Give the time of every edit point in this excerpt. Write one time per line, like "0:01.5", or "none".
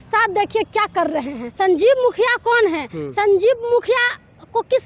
0:01.4

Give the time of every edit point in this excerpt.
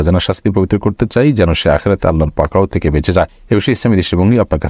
0:03.4

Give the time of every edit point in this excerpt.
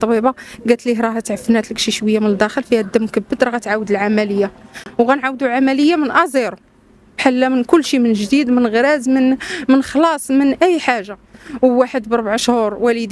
none

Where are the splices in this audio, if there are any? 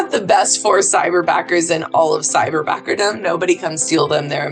none

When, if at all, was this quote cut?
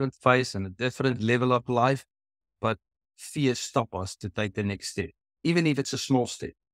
0:05.2

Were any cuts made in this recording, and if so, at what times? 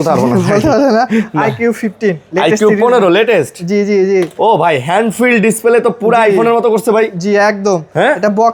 none

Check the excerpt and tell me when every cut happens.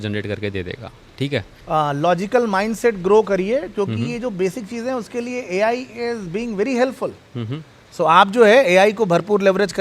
0:01.6

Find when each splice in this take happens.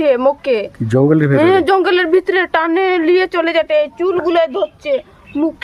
none

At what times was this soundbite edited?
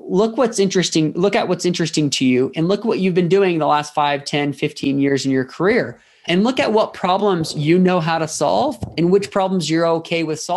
none

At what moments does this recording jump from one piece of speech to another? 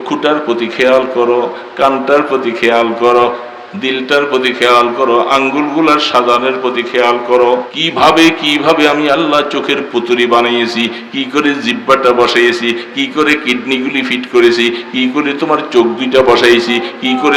0:07.8

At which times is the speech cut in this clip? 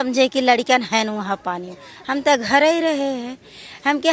none

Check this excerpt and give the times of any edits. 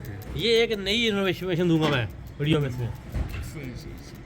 none

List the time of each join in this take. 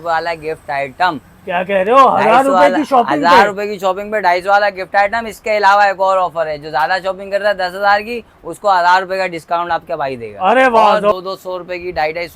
0:11.1

